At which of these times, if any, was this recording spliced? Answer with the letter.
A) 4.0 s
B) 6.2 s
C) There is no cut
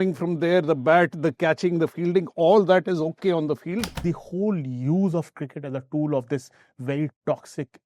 A